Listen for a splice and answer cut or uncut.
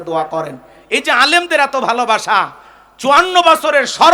uncut